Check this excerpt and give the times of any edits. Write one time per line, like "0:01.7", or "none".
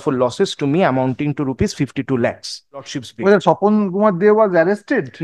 0:03.0